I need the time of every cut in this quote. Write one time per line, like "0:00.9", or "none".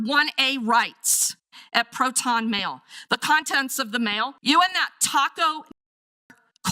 0:04.4